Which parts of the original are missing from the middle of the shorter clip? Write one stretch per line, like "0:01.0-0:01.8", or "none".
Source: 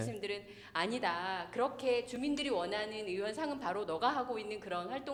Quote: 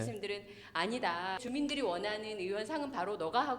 0:01.4-0:02.1